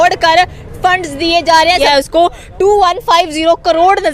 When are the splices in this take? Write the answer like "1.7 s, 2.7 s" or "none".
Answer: 1.8 s